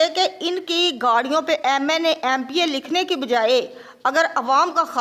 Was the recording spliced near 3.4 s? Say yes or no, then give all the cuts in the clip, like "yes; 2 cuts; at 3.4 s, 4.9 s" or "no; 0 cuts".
no; 0 cuts